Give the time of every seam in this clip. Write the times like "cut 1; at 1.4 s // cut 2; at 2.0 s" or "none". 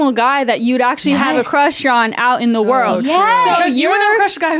none